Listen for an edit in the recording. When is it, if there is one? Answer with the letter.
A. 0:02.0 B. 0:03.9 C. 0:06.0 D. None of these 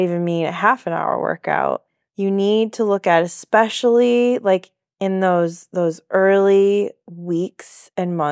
A